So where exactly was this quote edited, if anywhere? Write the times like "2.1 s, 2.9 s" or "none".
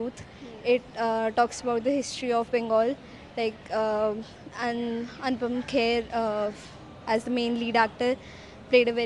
none